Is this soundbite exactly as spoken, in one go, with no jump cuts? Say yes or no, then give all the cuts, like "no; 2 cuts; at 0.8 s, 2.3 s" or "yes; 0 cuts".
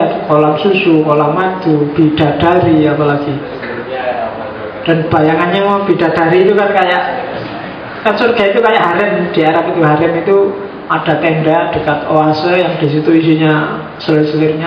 yes; 0 cuts